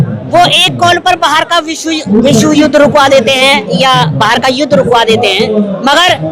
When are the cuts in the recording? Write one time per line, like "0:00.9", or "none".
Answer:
none